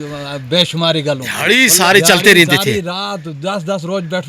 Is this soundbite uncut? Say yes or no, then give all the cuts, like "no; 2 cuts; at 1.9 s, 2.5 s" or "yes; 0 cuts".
no; 1 cut; at 1.3 s